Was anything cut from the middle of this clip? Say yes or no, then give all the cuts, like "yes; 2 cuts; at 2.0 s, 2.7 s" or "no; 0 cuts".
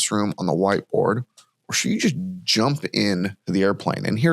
yes; 1 cut; at 3.4 s